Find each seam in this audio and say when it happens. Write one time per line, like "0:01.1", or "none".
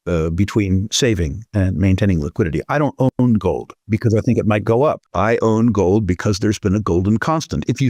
0:03.7
0:05.1

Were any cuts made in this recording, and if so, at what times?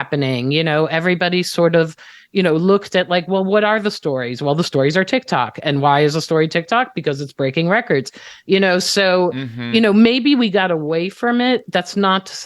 none

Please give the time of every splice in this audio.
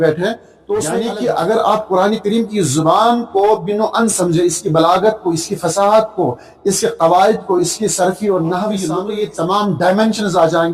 0:00.9
0:09.0

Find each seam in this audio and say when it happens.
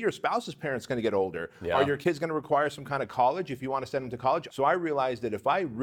0:04.5

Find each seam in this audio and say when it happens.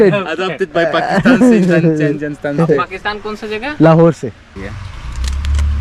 0:04.5

